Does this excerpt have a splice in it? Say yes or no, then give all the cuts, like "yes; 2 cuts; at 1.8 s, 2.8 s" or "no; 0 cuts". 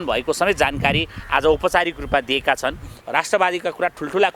yes; 1 cut; at 3.0 s